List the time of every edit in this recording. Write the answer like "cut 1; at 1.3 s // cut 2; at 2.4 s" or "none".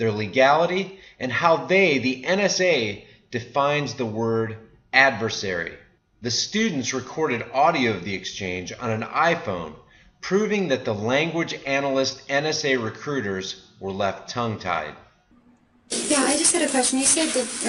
none